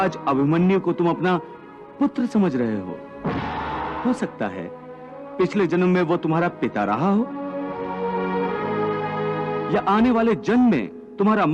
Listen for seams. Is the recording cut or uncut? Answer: cut